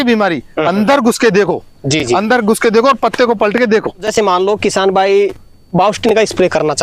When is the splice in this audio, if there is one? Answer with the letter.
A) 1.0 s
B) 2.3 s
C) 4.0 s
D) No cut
D